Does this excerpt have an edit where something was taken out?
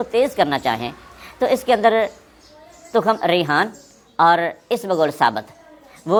no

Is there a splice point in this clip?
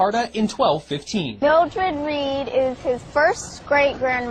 no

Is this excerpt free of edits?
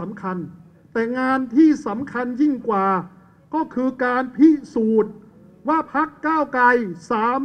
yes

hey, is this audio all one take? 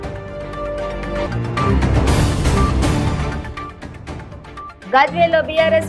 yes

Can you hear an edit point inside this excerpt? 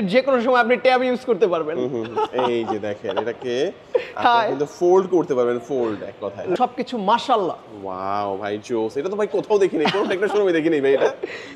yes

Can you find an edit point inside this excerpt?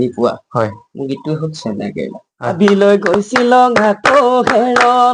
yes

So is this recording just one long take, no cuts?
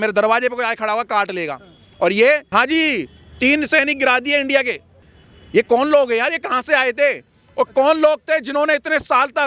yes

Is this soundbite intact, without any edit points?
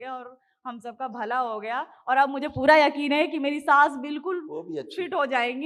yes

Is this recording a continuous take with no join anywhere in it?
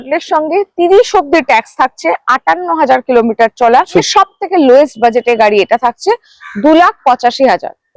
no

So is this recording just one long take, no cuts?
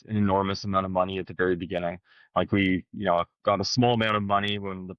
yes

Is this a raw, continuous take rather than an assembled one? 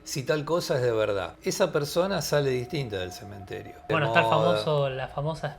no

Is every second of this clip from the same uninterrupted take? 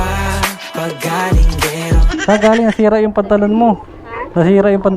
no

